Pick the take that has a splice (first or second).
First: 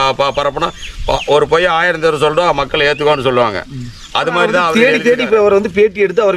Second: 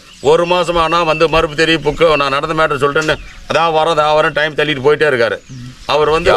first